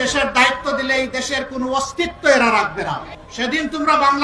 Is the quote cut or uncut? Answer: cut